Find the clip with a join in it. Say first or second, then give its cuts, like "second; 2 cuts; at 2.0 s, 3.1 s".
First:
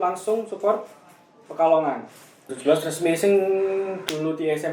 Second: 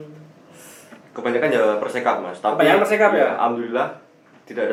first; 1 cut; at 2.5 s